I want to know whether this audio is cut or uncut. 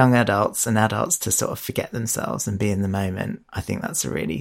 cut